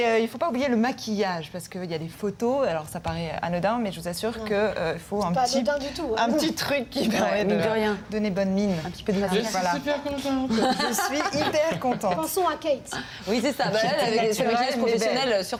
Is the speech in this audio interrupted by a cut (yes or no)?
no